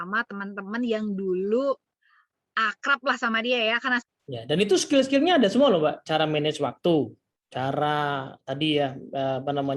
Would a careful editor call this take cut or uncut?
cut